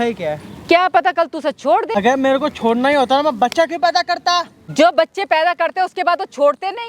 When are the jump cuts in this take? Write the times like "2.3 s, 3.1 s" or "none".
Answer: 1.9 s, 4.6 s